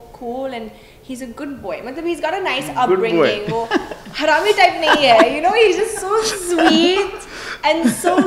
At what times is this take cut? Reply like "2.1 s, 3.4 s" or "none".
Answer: none